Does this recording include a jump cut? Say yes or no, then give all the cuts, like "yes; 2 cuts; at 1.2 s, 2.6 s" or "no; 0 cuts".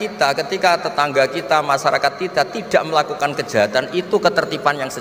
no; 0 cuts